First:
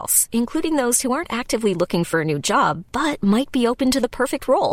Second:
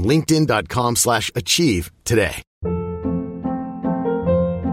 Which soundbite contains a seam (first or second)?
second